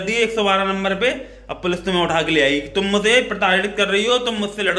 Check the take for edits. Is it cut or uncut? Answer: uncut